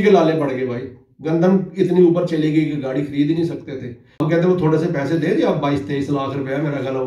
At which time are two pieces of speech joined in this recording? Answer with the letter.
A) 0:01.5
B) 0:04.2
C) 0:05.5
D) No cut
B